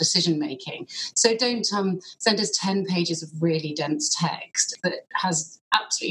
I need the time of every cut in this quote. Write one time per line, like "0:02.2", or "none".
0:04.7